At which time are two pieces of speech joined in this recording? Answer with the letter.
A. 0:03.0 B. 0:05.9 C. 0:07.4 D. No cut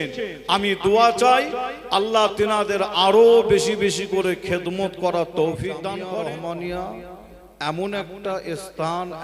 B